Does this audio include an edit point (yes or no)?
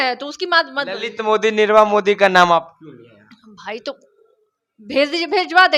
no